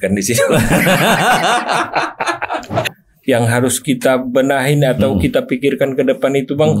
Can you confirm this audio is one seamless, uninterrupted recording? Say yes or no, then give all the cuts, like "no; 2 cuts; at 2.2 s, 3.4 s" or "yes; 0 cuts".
no; 1 cut; at 2.9 s